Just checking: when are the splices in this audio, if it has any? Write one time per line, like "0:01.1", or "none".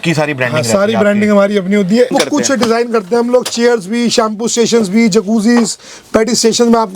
0:02.1